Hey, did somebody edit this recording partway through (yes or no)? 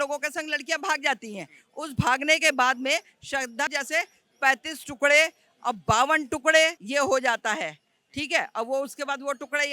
yes